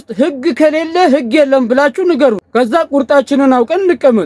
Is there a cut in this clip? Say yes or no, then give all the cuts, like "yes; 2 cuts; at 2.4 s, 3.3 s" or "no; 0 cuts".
yes; 1 cut; at 2.4 s